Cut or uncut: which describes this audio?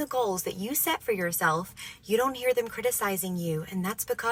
uncut